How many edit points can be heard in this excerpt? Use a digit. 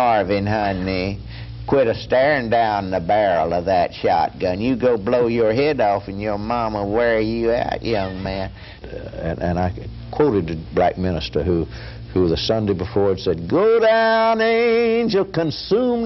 1